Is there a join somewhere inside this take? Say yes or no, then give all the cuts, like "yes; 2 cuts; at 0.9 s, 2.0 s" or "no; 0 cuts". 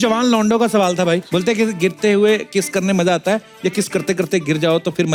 no; 0 cuts